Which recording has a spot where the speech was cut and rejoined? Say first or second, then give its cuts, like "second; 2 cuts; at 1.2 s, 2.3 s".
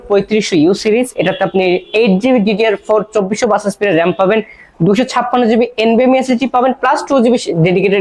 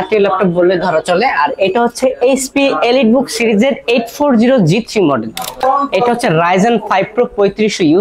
second; 1 cut; at 5.6 s